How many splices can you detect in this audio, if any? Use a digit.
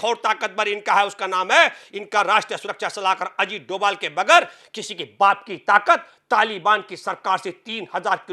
0